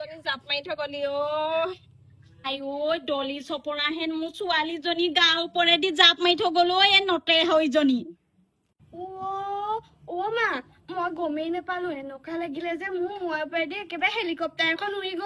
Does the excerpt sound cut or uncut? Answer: uncut